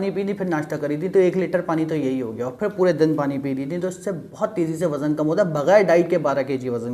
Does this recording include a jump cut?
no; 0 cuts

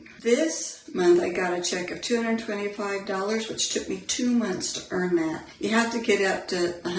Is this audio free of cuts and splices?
no; 1 cut; at 5.5 s

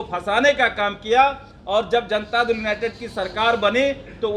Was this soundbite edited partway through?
no; 0 cuts

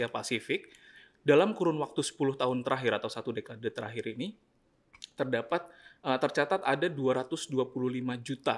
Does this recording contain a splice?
no; 0 cuts

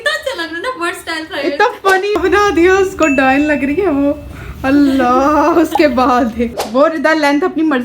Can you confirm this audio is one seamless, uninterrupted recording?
no; 2 cuts; at 2.2 s, 6.6 s

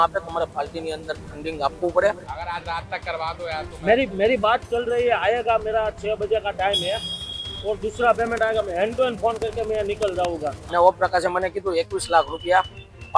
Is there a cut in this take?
yes; 2 cuts; at 2.3 s, 10.6 s

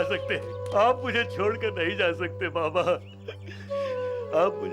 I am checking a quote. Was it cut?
no; 0 cuts

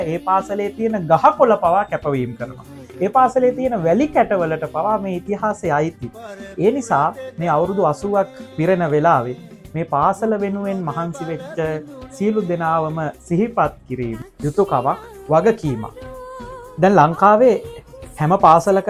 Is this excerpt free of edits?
yes; 0 cuts

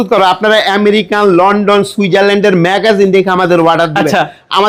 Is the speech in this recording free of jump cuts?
yes; 0 cuts

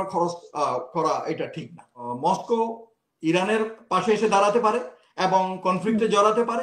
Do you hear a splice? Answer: yes; 1 cut; at 2.0 s

